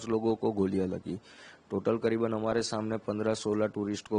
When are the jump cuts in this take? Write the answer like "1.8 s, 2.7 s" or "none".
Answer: none